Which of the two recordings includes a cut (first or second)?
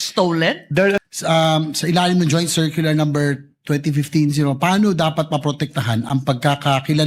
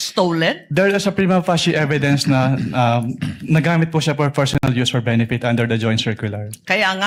first